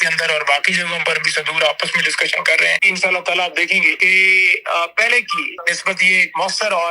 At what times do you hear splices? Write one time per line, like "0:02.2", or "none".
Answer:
0:02.9
0:04.0
0:05.5